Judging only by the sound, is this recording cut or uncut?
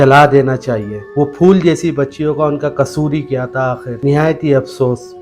cut